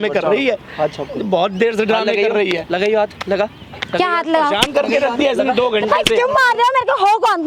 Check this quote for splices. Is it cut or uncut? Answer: uncut